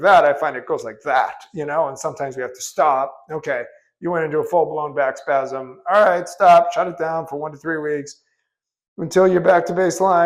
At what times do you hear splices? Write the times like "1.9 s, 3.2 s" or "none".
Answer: none